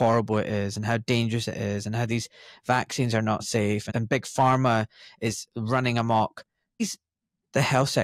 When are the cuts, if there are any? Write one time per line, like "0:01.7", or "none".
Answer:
0:03.9
0:06.8